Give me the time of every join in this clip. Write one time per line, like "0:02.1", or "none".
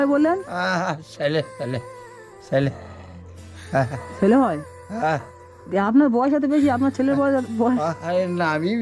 none